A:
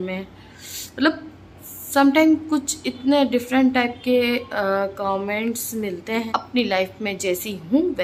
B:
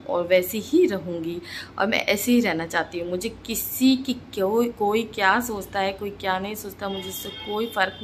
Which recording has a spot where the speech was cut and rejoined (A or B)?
A